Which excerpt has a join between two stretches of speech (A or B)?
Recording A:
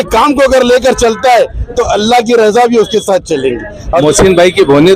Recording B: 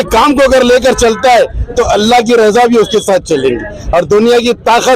A